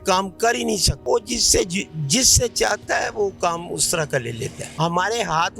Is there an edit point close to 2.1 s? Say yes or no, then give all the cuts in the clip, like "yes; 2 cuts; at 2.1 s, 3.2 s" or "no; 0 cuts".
no; 2 cuts; at 0.9 s, 4.7 s